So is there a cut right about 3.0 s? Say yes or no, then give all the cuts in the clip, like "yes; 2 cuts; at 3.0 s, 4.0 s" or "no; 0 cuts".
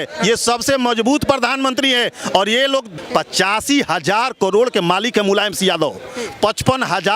yes; 1 cut; at 3.0 s